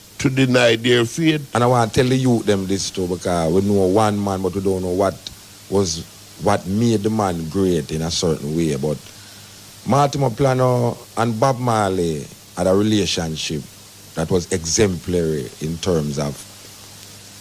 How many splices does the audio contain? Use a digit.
1